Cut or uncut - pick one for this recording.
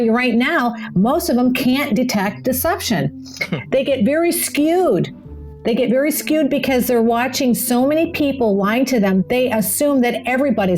cut